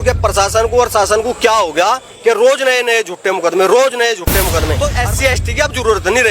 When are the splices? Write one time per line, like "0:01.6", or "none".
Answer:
0:04.8

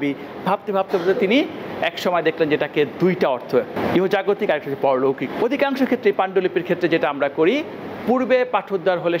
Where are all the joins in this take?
0:03.7
0:05.3

